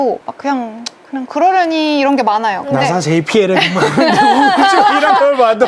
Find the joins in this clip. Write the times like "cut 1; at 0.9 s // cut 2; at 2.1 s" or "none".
none